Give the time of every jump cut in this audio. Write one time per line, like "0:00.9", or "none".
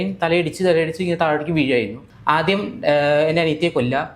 0:02.0